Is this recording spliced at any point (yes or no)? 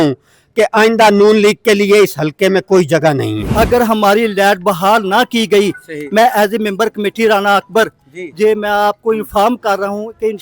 yes